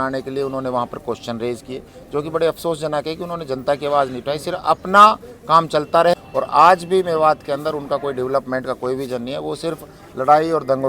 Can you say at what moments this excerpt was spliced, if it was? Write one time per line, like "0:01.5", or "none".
0:06.1

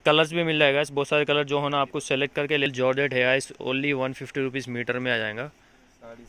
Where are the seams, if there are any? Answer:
0:02.7

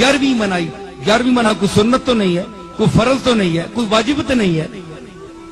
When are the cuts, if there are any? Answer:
0:01.5

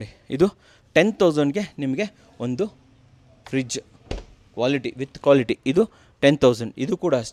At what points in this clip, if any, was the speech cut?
none

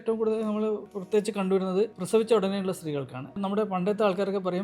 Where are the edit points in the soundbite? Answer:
0:00.9
0:02.0
0:03.4

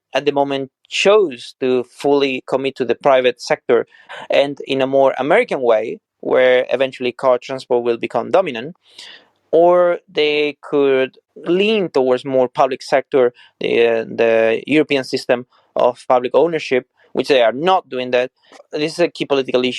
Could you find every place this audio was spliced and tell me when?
0:04.1
0:11.2
0:18.7

